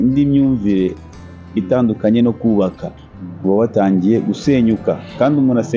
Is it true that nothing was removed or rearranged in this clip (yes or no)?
yes